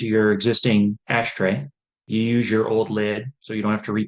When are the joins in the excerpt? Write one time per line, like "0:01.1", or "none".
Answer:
0:02.0